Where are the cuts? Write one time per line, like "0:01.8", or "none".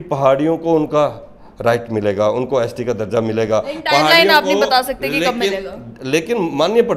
none